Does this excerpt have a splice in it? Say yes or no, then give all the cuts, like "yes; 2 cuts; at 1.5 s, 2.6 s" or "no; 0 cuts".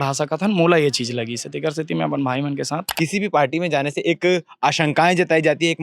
yes; 1 cut; at 2.8 s